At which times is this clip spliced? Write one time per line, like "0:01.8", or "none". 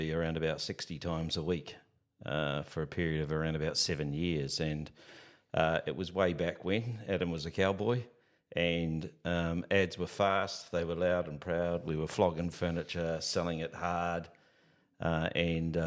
none